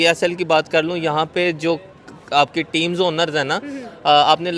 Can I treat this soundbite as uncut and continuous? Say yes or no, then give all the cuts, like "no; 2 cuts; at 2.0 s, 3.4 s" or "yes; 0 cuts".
yes; 0 cuts